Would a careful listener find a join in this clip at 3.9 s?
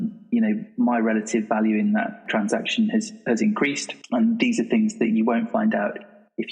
yes; 2 cuts; at 2.3 s, 3.9 s

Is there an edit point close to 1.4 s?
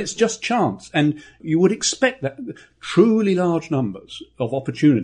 yes; 1 cut; at 1.4 s

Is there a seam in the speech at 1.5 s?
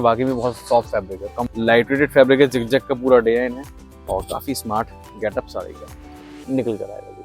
yes; 1 cut; at 1.5 s

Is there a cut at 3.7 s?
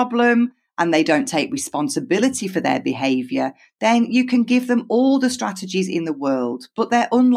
no; 0 cuts

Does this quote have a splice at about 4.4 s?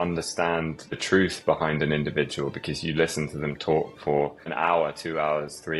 yes; 2 cuts; at 0.9 s, 4.4 s

